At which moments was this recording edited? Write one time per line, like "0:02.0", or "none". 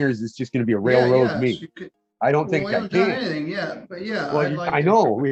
none